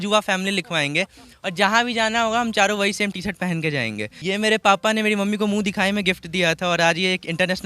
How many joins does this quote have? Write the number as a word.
one